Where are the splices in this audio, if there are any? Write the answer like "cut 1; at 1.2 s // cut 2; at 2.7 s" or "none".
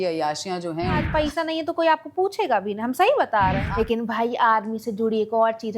cut 1; at 1.1 s // cut 2; at 3.6 s